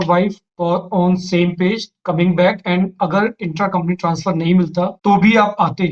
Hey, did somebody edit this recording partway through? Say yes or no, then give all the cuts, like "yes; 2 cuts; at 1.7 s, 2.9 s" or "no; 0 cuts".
yes; 1 cut; at 5.0 s